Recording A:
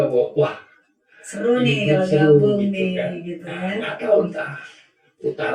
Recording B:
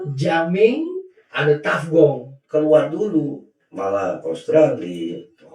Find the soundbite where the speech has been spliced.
B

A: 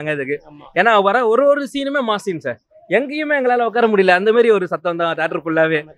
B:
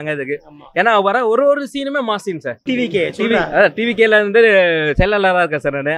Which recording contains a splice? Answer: B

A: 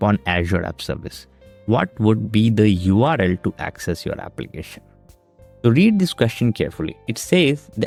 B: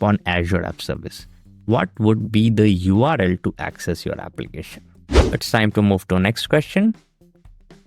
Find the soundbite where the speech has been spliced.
B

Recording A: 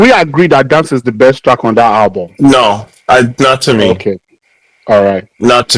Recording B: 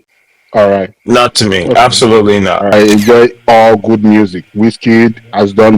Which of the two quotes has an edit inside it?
B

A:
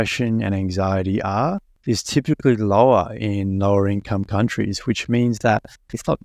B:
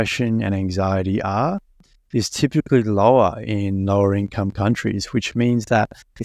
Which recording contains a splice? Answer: A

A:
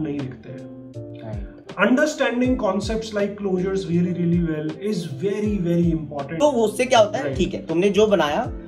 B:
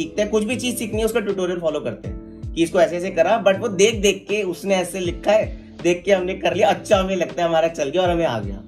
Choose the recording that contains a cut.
A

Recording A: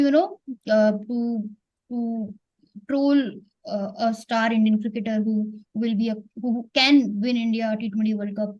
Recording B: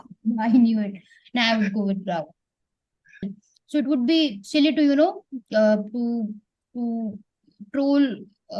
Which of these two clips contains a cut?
B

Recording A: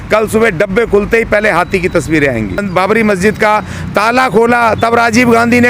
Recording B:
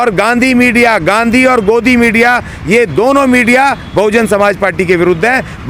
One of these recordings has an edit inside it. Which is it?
A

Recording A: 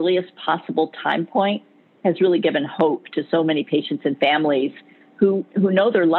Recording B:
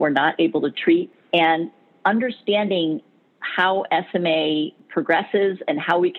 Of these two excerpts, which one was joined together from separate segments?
B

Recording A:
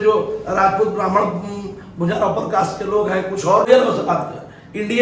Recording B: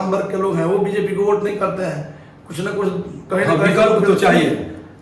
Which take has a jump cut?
A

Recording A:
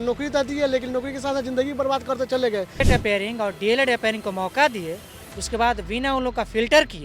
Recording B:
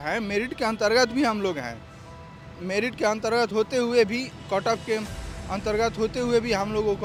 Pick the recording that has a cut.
A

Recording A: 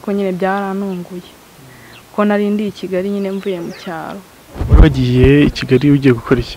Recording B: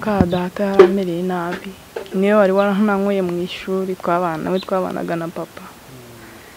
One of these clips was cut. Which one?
A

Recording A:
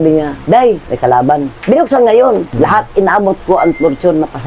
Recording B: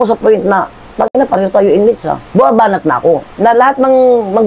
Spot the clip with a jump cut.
A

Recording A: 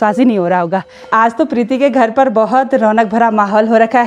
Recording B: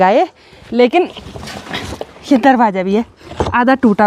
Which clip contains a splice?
A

